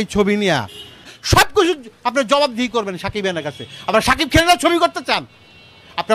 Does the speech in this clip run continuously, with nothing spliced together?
no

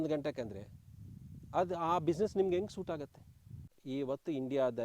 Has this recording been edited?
yes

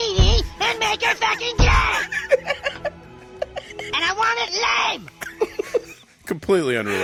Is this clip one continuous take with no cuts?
yes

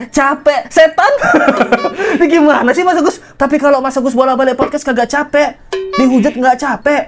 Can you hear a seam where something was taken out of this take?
yes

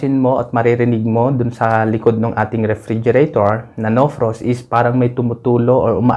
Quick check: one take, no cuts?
yes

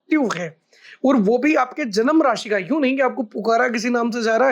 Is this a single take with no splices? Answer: yes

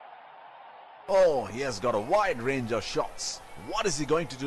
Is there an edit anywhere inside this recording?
yes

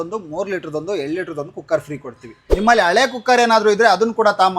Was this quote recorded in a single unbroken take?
no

